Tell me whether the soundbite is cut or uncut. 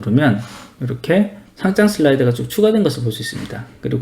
cut